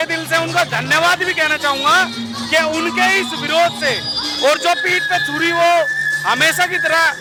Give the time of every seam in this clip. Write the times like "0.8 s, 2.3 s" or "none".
none